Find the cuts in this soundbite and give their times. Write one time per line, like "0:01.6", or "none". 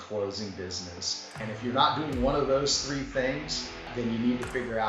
0:01.4
0:03.9